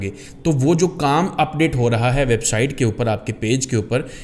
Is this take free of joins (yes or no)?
yes